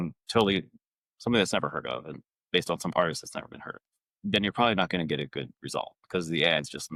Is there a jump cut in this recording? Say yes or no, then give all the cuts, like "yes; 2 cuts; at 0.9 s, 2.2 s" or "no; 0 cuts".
no; 0 cuts